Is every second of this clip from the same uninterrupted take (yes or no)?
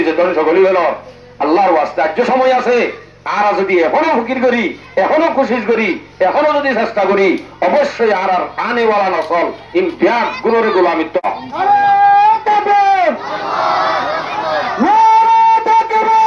no